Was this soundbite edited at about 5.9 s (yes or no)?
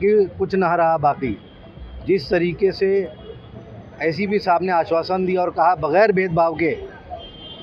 no